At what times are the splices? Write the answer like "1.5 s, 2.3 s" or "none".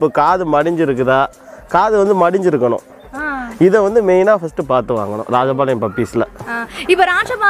none